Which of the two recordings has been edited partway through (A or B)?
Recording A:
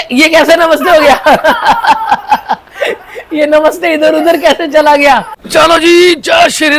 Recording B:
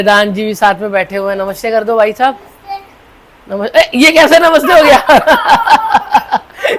A